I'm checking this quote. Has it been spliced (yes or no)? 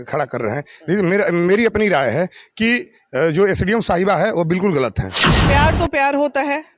yes